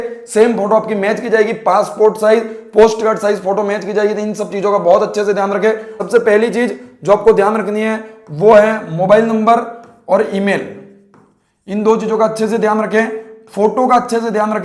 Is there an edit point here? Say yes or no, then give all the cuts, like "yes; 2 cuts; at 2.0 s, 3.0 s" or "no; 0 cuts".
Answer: yes; 1 cut; at 5.9 s